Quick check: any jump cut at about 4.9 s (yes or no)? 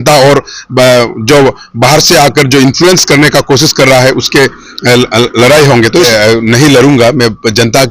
no